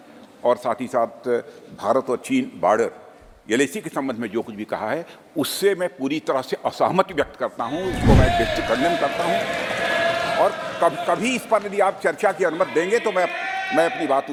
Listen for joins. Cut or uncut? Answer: uncut